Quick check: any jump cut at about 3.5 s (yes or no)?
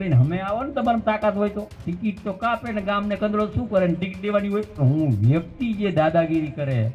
no